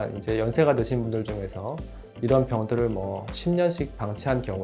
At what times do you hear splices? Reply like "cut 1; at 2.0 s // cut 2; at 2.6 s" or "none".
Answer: none